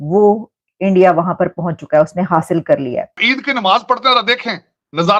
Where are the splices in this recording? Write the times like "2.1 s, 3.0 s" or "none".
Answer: 3.2 s